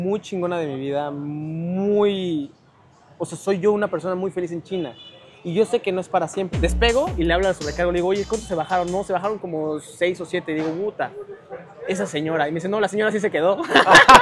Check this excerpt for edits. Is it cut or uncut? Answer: cut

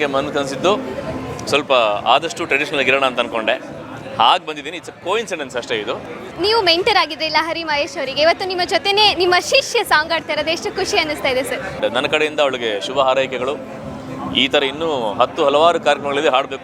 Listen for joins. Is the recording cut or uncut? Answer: cut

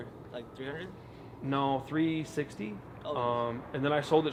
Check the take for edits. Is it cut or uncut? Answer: uncut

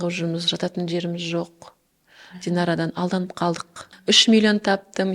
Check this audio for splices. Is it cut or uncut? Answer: cut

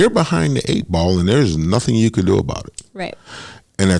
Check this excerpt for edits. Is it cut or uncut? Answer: uncut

